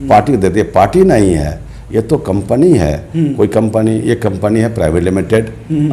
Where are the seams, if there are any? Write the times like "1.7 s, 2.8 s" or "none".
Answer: none

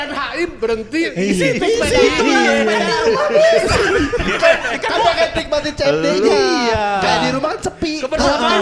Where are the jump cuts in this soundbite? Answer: none

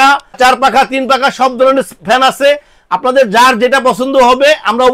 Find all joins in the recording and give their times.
none

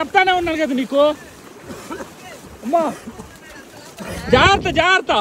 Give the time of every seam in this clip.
none

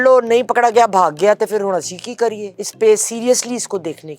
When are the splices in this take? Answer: 2.6 s

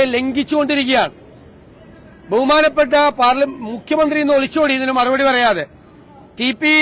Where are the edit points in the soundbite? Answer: none

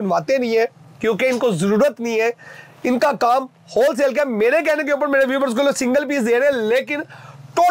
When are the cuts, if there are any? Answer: none

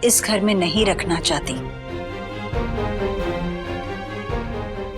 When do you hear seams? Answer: none

